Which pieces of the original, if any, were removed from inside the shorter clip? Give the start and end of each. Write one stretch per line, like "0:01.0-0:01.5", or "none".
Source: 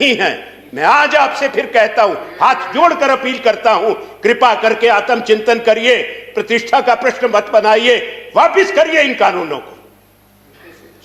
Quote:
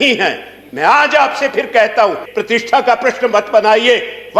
0:02.2-0:06.2